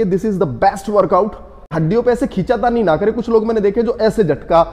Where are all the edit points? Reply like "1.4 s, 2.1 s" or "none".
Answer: 1.7 s